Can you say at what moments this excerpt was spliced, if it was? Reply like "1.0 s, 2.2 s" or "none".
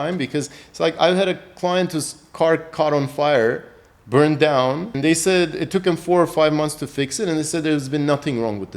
4.9 s